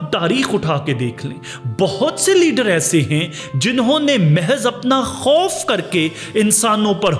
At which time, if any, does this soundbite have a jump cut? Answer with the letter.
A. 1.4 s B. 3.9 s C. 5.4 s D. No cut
D